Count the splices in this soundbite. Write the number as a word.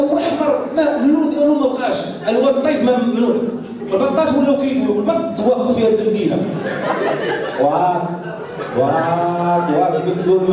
zero